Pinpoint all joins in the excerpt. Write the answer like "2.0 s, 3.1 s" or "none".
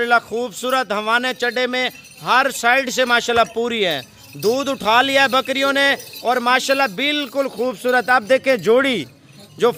none